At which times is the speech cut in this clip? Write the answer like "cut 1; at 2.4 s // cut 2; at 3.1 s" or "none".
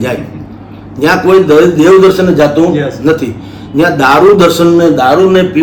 none